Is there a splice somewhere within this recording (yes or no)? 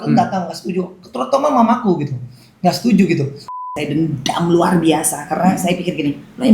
yes